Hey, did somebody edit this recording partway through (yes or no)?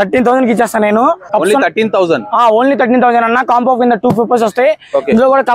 yes